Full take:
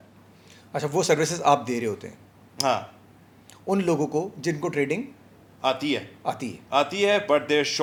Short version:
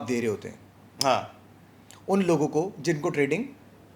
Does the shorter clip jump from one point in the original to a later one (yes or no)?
no